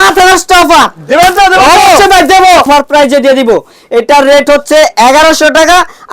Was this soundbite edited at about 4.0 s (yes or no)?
no